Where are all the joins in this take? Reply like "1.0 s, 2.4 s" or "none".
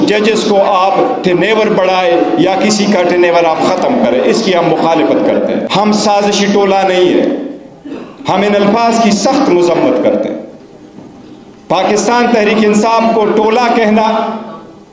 5.7 s